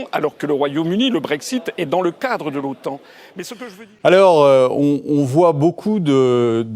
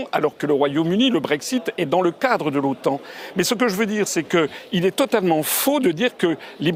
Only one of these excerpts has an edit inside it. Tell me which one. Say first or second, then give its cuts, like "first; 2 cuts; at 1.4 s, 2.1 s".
first; 1 cut; at 3.5 s